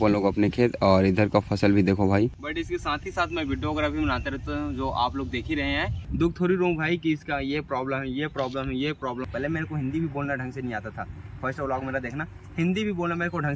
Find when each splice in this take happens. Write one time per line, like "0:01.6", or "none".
0:02.4
0:06.0
0:09.3